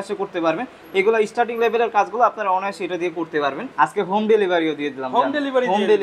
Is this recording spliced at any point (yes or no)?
yes